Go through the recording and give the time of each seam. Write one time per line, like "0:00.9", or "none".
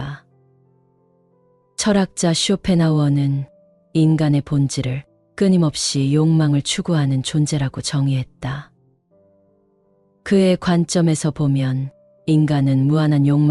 none